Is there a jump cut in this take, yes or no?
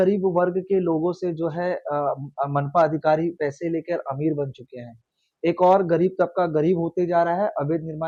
no